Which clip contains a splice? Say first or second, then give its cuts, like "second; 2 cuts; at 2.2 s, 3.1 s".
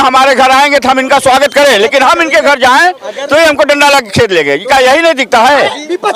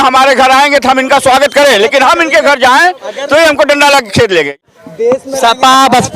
second; 1 cut; at 4.6 s